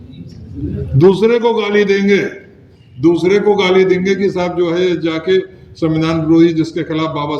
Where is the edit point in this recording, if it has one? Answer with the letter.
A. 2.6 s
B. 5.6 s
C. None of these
C